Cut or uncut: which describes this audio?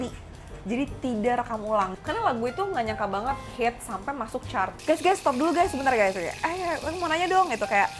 cut